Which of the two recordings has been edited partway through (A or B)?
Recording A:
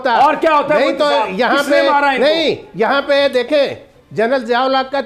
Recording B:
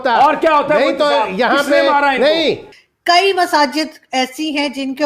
B